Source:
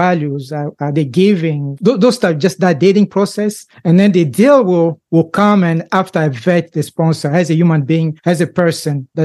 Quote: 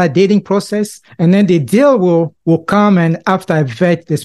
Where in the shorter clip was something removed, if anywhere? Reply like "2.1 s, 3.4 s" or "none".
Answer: none